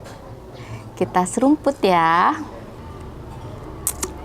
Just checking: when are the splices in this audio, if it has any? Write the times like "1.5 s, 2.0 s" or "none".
2.8 s